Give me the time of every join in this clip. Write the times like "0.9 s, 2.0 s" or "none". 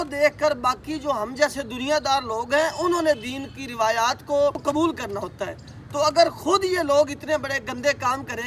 4.6 s